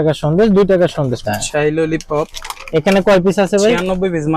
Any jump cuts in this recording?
yes; 1 cut; at 1.3 s

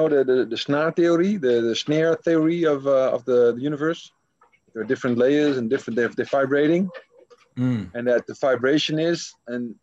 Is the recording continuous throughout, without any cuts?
yes; 0 cuts

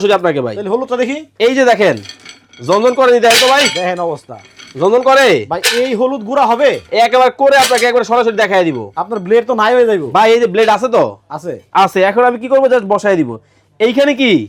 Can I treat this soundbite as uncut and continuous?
yes; 0 cuts

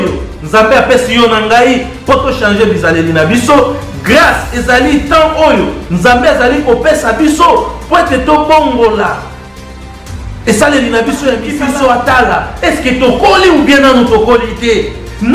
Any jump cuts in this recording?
yes; 1 cut; at 11.5 s

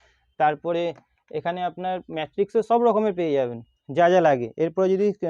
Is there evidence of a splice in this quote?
no; 0 cuts

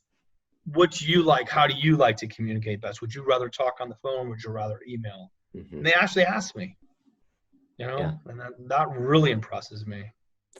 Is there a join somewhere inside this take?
no; 0 cuts

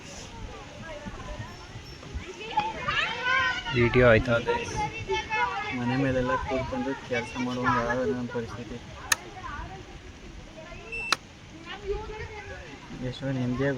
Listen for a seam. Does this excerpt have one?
no; 0 cuts

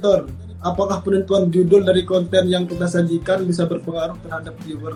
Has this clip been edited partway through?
no; 0 cuts

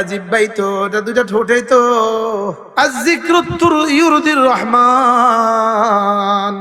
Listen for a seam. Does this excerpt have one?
yes; 1 cut; at 2.6 s

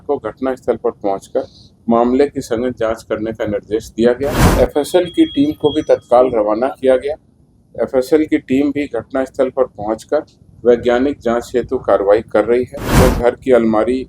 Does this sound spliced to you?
yes; 2 cuts; at 4.4 s, 12.8 s

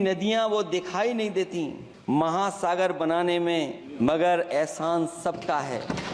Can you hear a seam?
yes; 2 cuts; at 1.9 s, 3.8 s

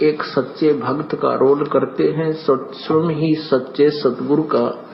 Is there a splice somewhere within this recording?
yes; 1 cut; at 1.1 s

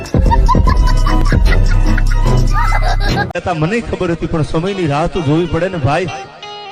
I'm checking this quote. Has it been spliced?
yes; 1 cut; at 3.3 s

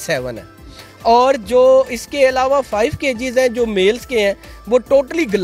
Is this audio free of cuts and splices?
yes; 0 cuts

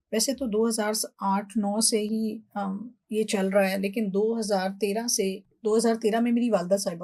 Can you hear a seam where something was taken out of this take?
no; 0 cuts

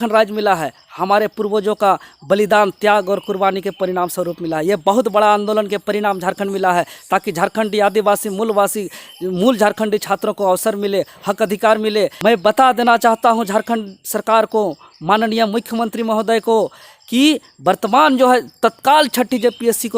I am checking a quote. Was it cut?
yes; 1 cut; at 12.0 s

